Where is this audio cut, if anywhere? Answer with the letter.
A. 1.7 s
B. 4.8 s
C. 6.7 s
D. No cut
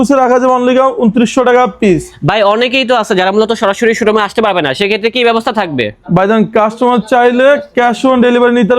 D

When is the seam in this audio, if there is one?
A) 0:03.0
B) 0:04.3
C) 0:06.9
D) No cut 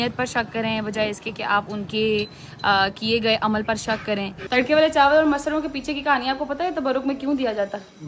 B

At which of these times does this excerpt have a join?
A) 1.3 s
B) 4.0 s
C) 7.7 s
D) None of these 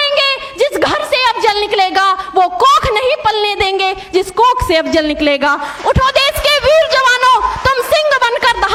D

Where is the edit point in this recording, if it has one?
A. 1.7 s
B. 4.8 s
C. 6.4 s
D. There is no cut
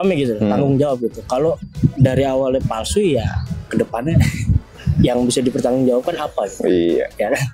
D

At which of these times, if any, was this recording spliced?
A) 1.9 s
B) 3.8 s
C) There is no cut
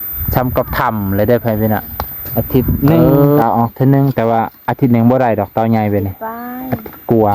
A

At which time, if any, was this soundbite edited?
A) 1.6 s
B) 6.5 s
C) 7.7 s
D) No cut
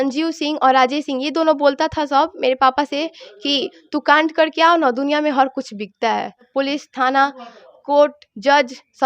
B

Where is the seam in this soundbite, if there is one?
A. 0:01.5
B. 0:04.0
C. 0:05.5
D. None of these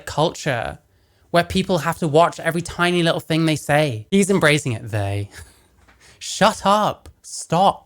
B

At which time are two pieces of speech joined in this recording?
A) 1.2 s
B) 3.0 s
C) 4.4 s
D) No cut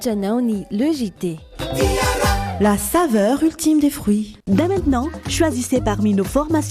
C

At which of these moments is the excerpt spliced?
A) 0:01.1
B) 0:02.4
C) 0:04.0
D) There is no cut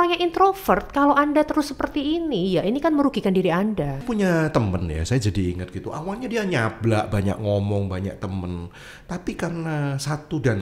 C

